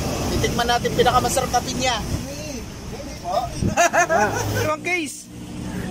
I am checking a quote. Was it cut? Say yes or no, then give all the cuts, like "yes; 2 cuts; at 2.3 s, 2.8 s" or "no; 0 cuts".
yes; 3 cuts; at 2.1 s, 3.7 s, 4.6 s